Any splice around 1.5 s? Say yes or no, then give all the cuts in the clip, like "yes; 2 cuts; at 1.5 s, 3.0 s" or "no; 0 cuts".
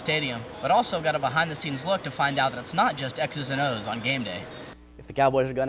no; 1 cut; at 4.6 s